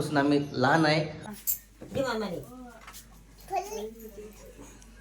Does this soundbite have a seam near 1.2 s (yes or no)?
yes